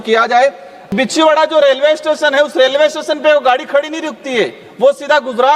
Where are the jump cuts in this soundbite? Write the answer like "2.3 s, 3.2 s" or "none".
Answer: 0.9 s